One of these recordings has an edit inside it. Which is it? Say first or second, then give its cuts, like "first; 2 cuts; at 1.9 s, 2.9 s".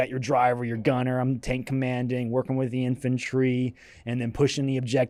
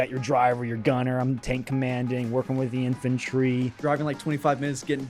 second; 1 cut; at 3.7 s